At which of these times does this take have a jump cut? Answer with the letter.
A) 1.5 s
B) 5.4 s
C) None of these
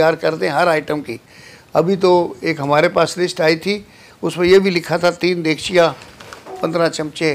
C